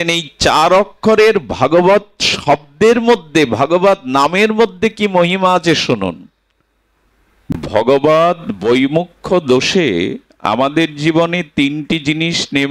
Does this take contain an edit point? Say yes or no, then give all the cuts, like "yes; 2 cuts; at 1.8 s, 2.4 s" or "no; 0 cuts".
yes; 1 cut; at 7.6 s